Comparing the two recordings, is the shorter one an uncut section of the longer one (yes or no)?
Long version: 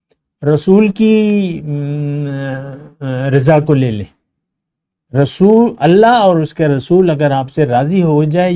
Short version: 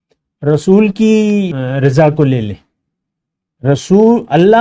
no